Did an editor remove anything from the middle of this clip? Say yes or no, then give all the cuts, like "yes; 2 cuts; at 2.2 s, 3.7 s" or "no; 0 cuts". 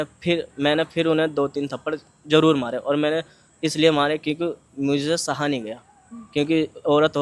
no; 0 cuts